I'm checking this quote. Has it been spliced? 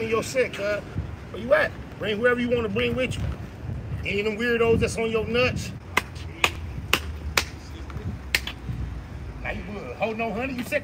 yes; 3 cuts; at 1.0 s, 1.9 s, 5.7 s

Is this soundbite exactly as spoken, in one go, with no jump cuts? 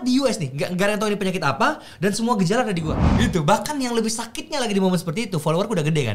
no; 1 cut; at 3.0 s

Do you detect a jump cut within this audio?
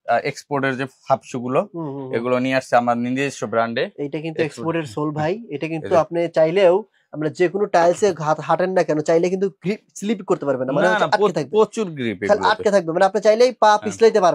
no; 0 cuts

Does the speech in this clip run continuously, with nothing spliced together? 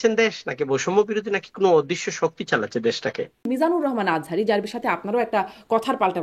no; 1 cut; at 3.4 s

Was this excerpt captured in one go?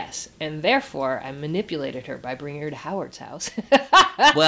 yes; 0 cuts

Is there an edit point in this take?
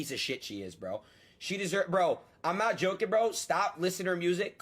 no; 0 cuts

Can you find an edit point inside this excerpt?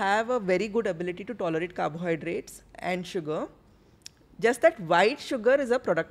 no; 0 cuts

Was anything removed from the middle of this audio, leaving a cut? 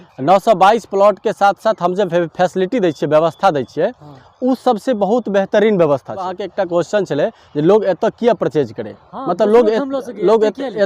yes; 1 cut; at 6.4 s

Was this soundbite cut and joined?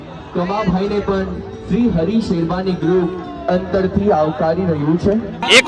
no; 0 cuts

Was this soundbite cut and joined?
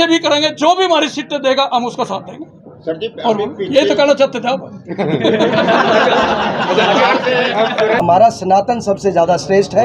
yes; 1 cut; at 8.0 s

